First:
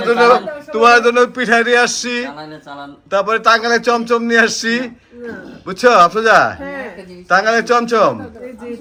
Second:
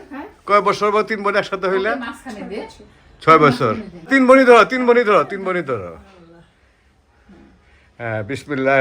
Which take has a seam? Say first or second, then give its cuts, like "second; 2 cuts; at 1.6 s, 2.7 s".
second; 1 cut; at 4.1 s